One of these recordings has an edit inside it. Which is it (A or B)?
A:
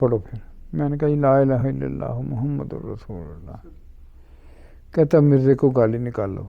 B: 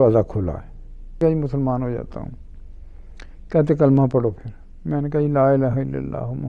B